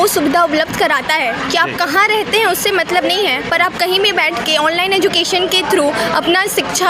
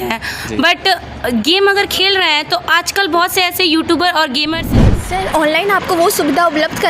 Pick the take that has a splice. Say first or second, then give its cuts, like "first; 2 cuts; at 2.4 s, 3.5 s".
second; 1 cut; at 4.8 s